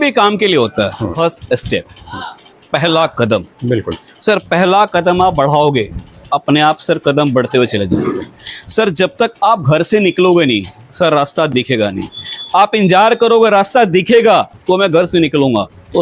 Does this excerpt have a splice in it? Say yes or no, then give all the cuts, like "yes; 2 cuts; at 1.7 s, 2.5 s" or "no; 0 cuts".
yes; 1 cut; at 1.1 s